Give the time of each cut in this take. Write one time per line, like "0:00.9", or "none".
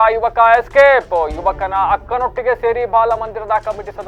none